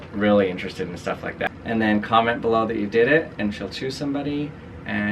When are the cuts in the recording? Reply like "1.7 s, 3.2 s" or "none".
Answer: 1.5 s